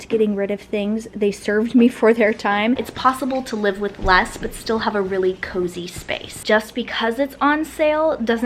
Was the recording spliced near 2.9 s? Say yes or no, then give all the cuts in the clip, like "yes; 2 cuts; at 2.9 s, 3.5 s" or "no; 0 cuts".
yes; 2 cuts; at 2.9 s, 6.2 s